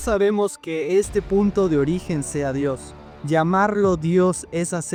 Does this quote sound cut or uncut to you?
uncut